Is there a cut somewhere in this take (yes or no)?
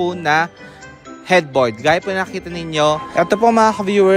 yes